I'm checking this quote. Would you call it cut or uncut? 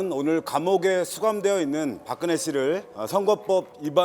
cut